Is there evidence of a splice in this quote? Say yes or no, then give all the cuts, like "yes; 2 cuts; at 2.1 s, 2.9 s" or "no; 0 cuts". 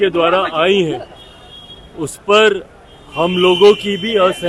no; 0 cuts